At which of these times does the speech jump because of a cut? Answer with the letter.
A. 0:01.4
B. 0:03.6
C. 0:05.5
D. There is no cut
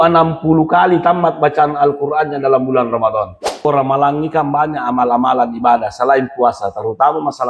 B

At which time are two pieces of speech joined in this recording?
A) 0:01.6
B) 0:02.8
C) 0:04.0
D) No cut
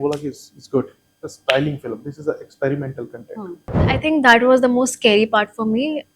C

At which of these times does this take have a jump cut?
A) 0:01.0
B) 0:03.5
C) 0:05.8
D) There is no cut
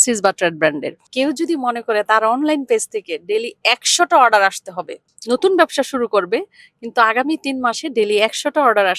A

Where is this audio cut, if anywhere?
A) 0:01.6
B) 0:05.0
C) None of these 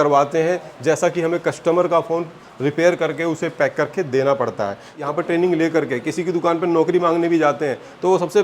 B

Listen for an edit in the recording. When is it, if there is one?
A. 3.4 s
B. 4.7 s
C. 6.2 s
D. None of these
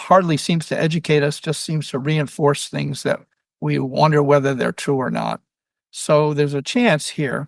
D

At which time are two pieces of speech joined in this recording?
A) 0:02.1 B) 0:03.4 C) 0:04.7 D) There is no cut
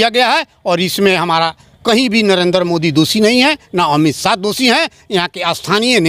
D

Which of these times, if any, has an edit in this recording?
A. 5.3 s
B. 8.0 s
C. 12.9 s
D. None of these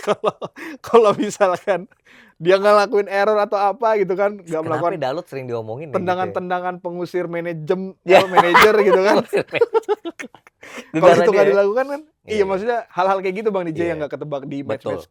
D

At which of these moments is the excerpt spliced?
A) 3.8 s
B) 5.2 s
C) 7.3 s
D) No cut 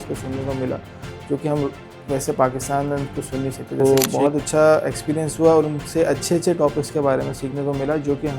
A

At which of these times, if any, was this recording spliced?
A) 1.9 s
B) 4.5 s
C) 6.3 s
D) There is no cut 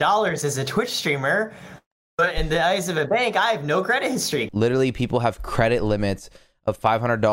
B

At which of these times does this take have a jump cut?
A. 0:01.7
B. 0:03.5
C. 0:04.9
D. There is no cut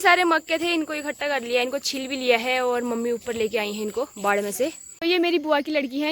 C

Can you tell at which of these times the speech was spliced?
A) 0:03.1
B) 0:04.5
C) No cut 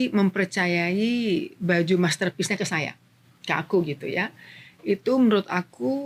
C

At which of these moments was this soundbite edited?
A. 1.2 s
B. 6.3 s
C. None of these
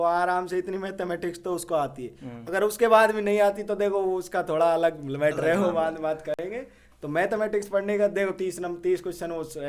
C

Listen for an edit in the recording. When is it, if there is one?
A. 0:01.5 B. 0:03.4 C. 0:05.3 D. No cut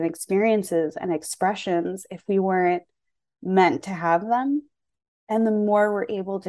C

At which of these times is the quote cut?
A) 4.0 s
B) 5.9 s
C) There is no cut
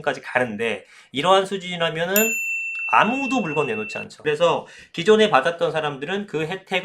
A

